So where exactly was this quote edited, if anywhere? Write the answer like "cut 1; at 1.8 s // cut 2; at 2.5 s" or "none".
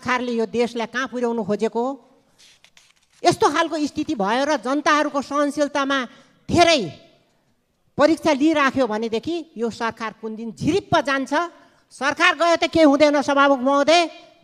none